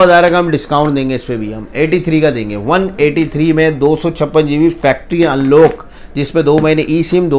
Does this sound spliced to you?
no; 0 cuts

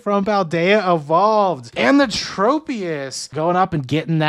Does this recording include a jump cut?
yes; 2 cuts; at 1.7 s, 3.2 s

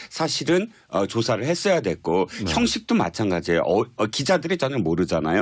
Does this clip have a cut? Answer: yes; 1 cut; at 2.8 s

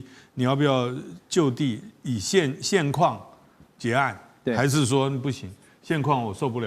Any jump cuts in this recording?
no; 0 cuts

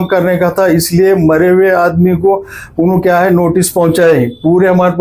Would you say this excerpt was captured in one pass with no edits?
yes; 0 cuts

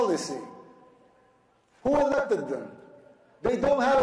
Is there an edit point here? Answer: no; 0 cuts

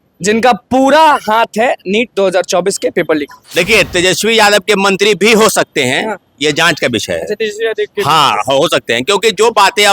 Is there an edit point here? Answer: yes; 1 cut; at 3.4 s

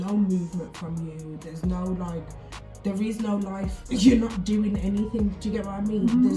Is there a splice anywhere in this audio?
no; 0 cuts

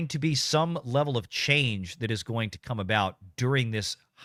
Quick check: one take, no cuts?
yes; 0 cuts

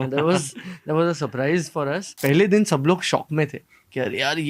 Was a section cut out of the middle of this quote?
yes; 1 cut; at 2.2 s

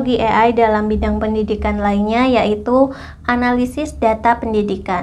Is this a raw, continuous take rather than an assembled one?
yes; 0 cuts

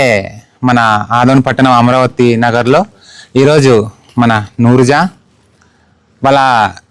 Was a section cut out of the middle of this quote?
no; 0 cuts

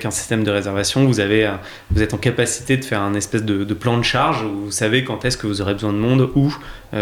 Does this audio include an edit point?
no; 0 cuts

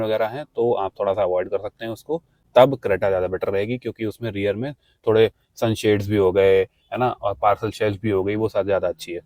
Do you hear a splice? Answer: no; 0 cuts

